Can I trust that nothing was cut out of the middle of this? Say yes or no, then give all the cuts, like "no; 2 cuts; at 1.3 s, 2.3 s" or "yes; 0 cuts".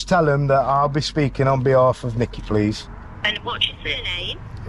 yes; 0 cuts